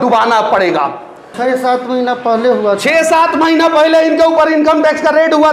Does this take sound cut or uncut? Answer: cut